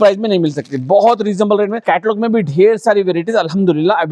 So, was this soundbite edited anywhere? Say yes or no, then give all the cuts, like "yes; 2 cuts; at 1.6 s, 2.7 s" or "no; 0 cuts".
yes; 1 cut; at 1.8 s